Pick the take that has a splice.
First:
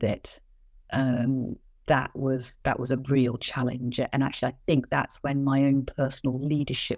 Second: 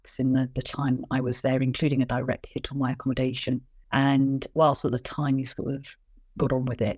second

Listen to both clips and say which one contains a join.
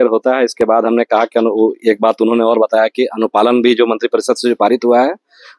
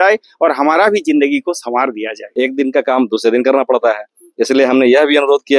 second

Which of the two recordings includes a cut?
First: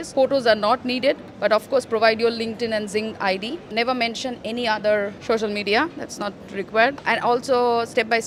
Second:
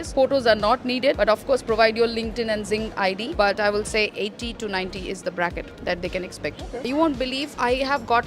second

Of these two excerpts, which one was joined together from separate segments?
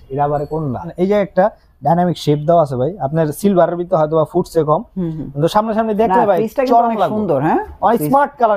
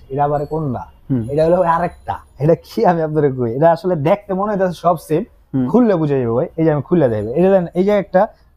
first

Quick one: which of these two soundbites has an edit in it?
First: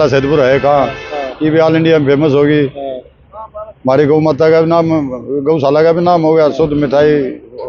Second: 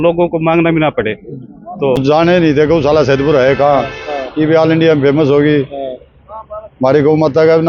second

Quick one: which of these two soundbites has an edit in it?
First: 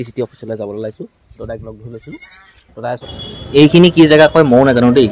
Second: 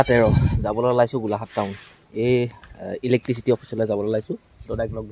first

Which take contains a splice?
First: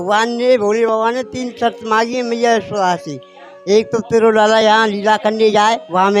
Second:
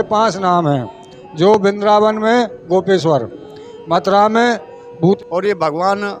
second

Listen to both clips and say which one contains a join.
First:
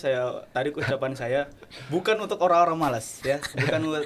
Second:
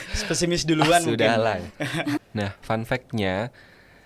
second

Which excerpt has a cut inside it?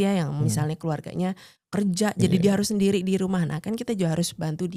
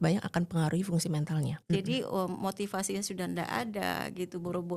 second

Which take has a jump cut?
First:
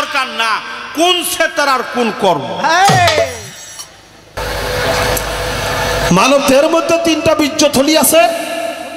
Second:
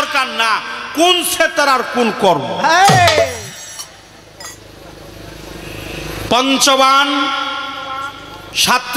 first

